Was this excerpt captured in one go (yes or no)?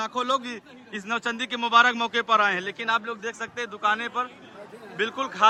yes